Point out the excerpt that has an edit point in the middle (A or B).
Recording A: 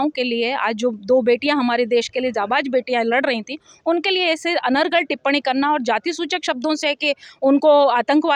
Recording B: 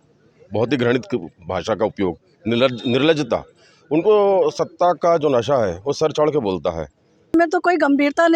B